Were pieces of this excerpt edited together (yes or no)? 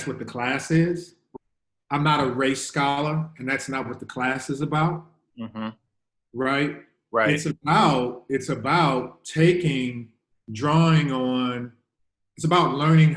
yes